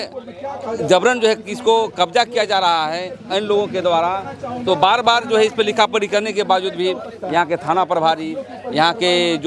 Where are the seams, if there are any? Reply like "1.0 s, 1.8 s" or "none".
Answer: none